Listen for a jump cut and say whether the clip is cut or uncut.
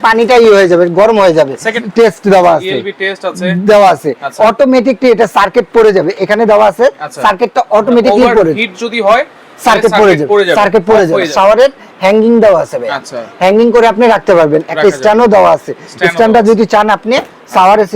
cut